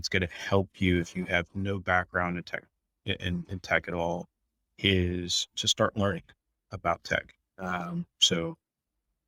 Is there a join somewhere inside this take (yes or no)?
no